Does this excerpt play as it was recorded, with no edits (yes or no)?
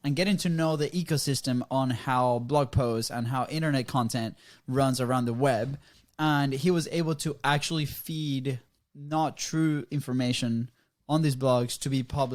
yes